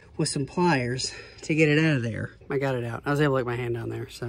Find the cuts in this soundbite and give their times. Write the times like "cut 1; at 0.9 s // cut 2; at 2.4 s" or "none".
cut 1; at 2.3 s